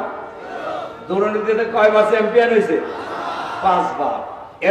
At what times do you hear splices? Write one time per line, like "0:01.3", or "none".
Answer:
none